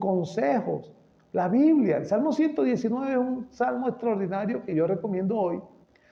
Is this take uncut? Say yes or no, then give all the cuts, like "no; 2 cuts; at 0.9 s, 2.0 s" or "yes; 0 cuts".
yes; 0 cuts